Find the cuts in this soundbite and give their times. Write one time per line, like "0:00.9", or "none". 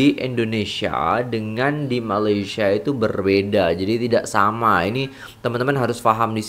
none

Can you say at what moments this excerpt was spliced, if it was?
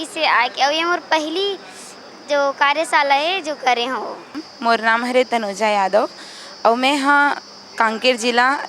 0:04.5

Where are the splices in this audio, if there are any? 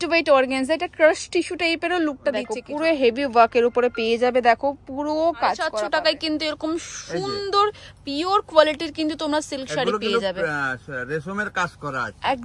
0:02.6
0:05.8

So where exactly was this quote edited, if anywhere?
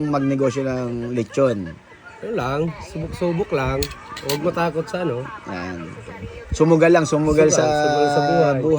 none

